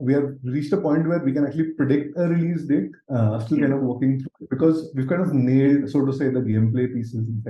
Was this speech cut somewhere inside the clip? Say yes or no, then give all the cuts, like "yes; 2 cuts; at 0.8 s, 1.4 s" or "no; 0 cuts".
no; 0 cuts